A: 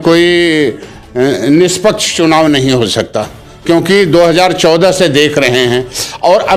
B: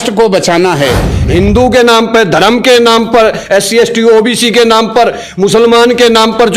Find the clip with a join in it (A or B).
B